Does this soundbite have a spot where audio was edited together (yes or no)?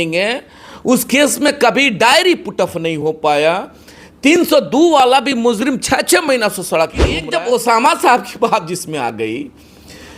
yes